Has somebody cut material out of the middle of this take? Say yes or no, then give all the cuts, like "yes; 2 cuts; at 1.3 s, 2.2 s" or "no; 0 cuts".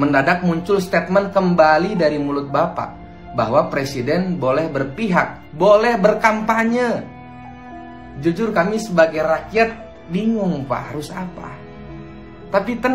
no; 0 cuts